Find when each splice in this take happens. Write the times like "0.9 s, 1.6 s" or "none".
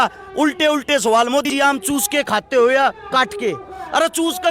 1.5 s